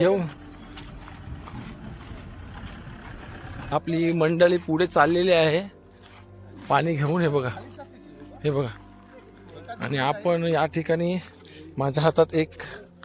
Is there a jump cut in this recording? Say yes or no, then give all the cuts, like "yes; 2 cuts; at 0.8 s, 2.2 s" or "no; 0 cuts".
yes; 1 cut; at 3.7 s